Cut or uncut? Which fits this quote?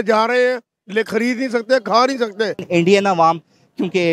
cut